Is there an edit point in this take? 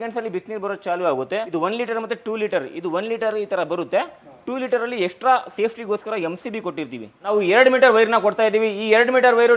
yes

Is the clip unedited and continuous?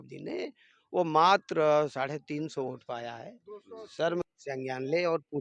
no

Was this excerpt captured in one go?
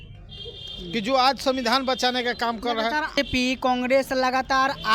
no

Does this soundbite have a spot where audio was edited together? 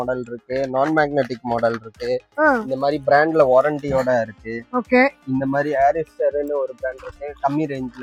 no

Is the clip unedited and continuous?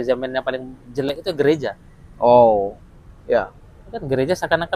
yes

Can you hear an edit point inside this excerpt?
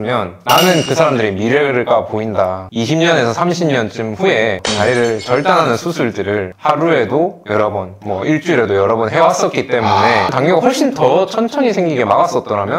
yes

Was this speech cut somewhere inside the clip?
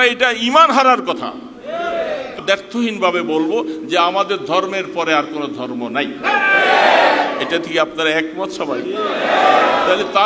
yes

